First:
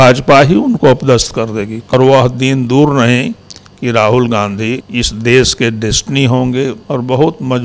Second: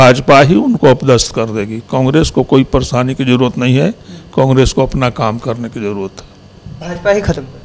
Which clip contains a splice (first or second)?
first